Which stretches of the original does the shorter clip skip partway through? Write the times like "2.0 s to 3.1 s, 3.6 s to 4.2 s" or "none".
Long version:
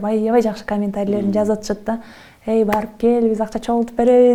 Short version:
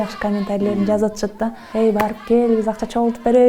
2.1 s to 2.3 s

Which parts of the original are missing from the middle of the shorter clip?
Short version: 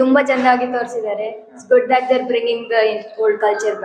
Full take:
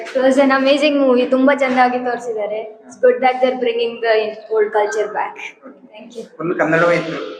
none

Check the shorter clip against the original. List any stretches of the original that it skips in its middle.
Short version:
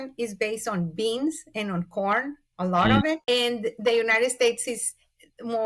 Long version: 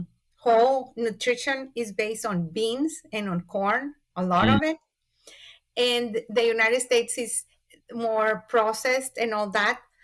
4.8 s to 5.7 s

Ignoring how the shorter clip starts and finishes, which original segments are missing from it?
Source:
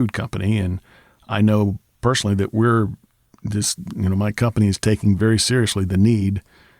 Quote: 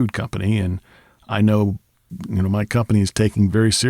2.0 s to 3.6 s

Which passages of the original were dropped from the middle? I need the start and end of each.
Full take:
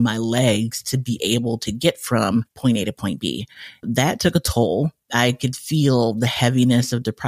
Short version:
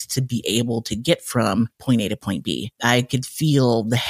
3.5 s to 5.0 s

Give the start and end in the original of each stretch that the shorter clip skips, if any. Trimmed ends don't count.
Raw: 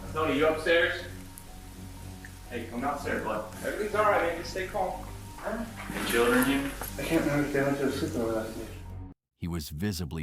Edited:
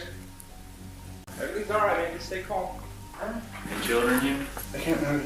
2.3 s to 3.5 s

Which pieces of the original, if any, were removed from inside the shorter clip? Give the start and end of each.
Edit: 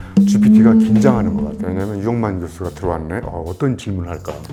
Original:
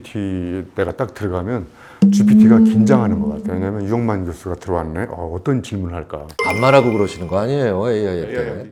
none

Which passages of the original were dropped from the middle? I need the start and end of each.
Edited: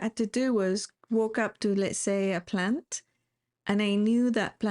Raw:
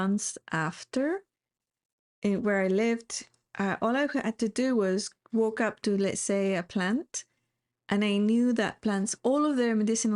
none

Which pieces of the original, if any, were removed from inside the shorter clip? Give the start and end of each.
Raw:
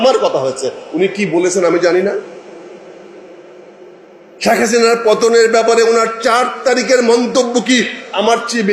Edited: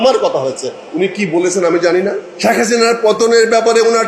2.3 s to 4.3 s

